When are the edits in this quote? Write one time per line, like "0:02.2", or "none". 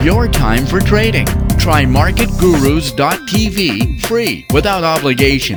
none